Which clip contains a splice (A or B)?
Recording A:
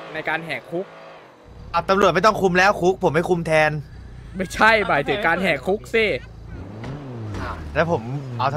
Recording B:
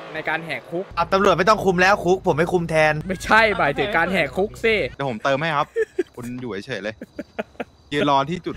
B